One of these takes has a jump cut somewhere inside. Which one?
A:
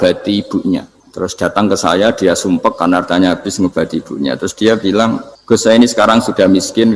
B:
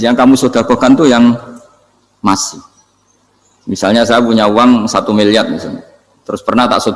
A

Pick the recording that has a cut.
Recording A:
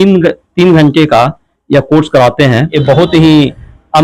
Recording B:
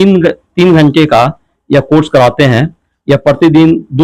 A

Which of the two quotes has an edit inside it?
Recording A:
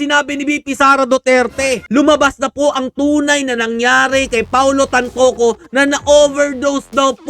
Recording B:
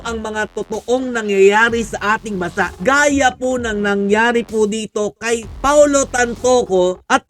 A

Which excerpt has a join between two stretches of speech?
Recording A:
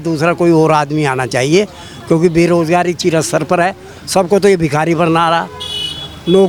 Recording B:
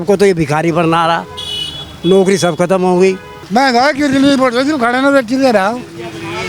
B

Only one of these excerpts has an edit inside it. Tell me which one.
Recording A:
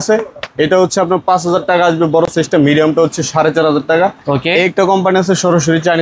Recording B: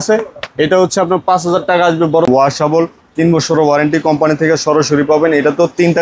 B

